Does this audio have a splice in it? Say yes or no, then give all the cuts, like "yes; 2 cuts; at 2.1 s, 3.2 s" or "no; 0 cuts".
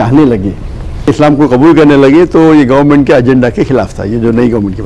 yes; 1 cut; at 1.1 s